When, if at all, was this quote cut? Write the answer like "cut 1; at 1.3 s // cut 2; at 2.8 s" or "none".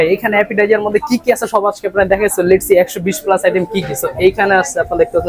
none